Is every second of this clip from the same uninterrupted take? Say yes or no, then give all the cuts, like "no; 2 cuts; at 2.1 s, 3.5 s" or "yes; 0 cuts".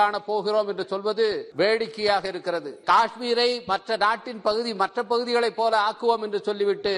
no; 2 cuts; at 1.5 s, 2.8 s